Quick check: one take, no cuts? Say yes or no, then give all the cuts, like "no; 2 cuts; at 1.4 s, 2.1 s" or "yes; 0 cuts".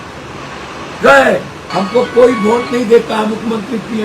no; 1 cut; at 1.6 s